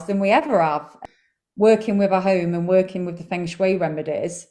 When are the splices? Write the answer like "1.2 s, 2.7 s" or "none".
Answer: 1.0 s